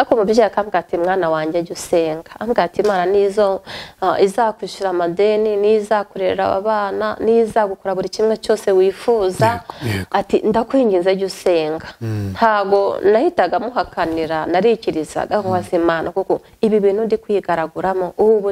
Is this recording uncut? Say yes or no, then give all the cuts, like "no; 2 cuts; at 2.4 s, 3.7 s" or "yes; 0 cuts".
yes; 0 cuts